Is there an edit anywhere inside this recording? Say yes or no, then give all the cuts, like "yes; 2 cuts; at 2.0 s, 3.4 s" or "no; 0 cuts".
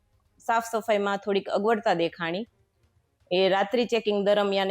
no; 0 cuts